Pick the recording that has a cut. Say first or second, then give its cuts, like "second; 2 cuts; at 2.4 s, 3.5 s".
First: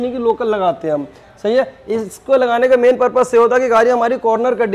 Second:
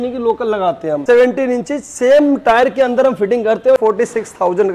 second; 2 cuts; at 1.0 s, 3.8 s